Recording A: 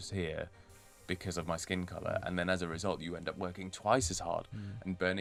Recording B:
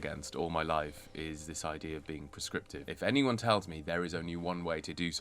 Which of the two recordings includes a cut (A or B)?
B